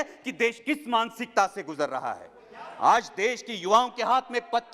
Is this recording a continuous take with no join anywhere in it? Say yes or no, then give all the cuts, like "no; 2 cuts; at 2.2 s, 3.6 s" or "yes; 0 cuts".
yes; 0 cuts